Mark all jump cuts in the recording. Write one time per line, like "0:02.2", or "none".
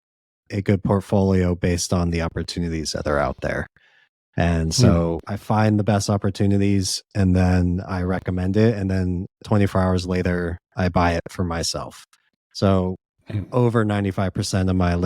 0:05.3